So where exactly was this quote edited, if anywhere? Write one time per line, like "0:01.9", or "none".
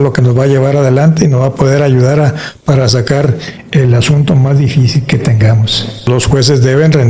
0:06.1